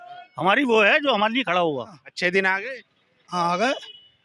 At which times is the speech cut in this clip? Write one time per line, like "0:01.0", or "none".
0:02.0

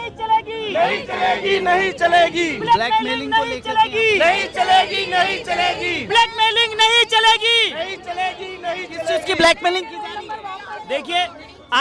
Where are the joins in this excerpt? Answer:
none

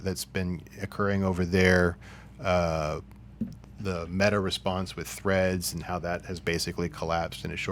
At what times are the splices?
none

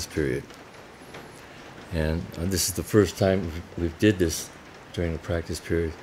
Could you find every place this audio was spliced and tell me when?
none

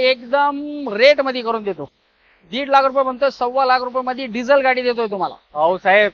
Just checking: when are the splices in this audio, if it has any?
none

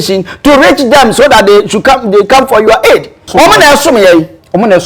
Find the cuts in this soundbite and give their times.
0:03.2

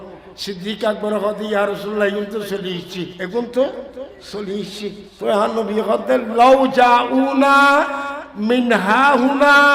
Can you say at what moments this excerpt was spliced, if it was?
0:03.1
0:05.1

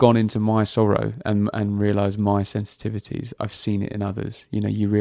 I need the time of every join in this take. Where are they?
none

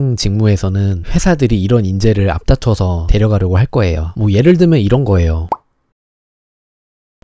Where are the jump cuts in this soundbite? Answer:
none

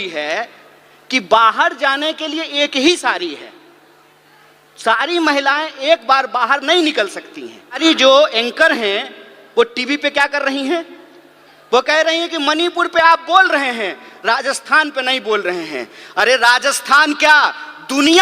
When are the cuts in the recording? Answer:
0:07.8

